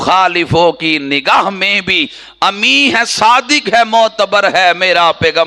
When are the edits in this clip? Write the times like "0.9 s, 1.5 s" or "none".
none